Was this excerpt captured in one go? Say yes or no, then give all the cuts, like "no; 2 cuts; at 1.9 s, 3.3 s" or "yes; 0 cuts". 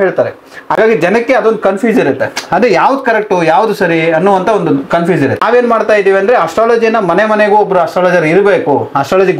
no; 1 cut; at 5.4 s